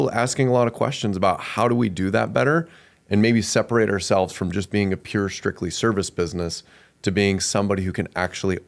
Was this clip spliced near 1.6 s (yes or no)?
no